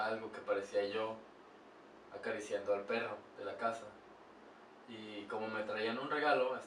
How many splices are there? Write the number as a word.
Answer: zero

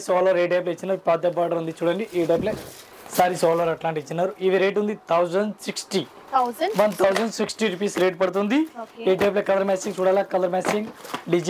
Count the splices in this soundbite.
zero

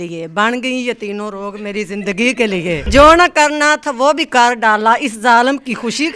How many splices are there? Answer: one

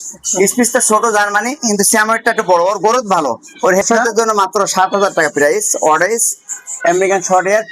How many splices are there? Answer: one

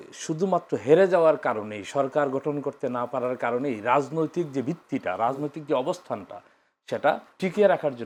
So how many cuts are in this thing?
zero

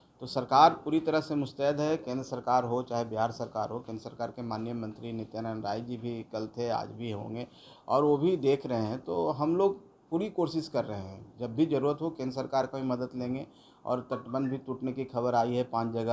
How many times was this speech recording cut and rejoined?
zero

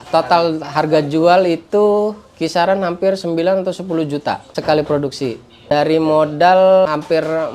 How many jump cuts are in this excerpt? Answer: three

